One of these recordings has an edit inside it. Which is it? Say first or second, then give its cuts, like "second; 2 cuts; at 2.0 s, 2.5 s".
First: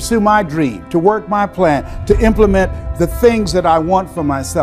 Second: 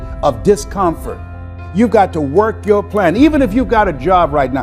second; 1 cut; at 1.6 s